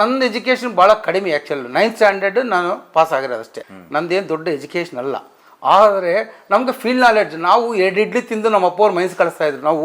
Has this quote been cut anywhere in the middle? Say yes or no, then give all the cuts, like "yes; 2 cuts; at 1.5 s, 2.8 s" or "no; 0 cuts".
no; 0 cuts